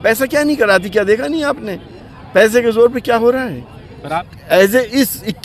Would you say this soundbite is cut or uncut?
cut